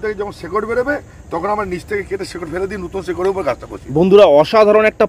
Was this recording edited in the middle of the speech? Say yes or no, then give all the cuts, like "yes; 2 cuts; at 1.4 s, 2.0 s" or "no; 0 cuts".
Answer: no; 0 cuts